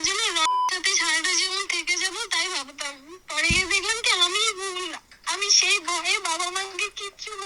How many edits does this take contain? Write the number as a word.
zero